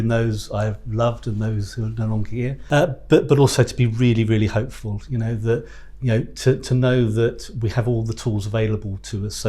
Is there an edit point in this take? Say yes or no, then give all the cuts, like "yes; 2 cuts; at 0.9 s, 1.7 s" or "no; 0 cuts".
yes; 1 cut; at 2.6 s